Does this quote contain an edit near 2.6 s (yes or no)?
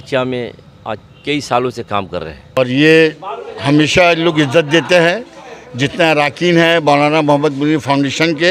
yes